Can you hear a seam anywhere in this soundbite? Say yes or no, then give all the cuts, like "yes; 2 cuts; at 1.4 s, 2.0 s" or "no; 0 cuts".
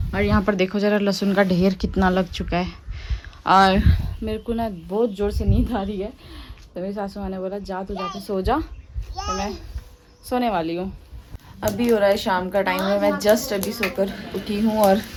no; 0 cuts